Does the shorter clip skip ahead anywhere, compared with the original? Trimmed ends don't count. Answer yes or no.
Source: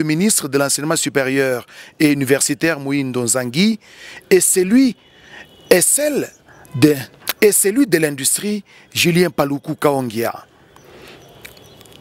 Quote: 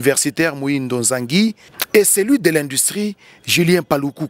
yes